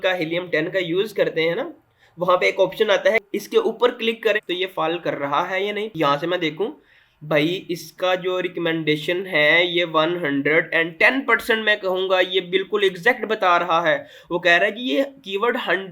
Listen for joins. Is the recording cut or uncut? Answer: cut